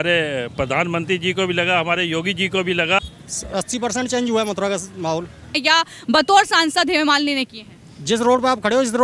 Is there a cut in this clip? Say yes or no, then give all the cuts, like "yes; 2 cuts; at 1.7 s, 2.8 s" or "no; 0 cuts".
yes; 2 cuts; at 3.0 s, 5.5 s